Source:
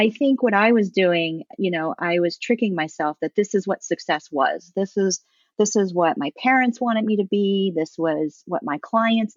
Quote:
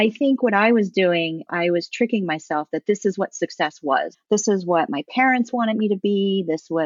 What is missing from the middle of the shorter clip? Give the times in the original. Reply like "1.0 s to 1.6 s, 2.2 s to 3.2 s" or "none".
1.5 s to 2.0 s, 4.6 s to 5.4 s

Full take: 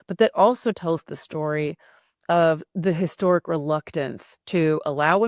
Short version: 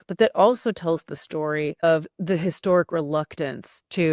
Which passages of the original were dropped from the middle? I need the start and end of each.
1.8 s to 2.4 s

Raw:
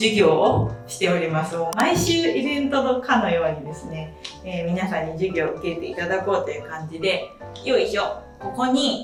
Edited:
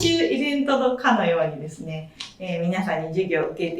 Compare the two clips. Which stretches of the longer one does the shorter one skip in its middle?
none

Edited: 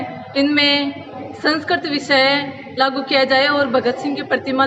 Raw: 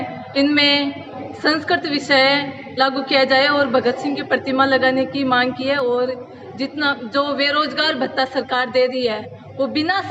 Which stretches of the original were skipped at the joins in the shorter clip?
none

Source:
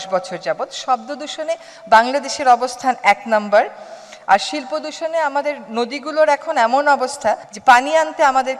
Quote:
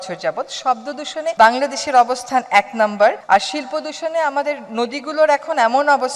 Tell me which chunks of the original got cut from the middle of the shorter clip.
1.6 s to 1.9 s, 3.7 s to 4.2 s

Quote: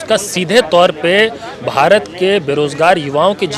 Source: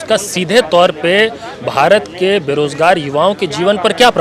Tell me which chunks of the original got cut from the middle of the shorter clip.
none

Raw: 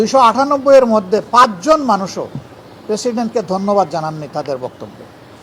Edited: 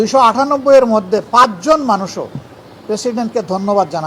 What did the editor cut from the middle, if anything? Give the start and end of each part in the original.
none

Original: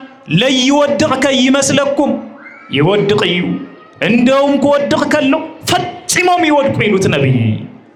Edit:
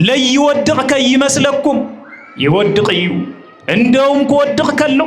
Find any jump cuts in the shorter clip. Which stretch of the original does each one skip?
none

